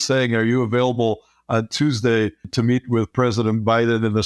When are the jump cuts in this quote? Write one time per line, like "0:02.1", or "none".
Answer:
0:02.5